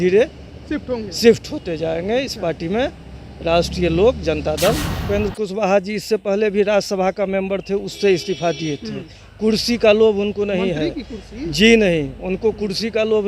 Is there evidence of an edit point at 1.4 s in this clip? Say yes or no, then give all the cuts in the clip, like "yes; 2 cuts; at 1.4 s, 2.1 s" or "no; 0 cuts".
no; 1 cut; at 4.9 s